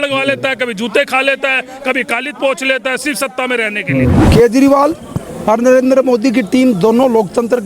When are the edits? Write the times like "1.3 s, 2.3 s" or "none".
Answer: 4.2 s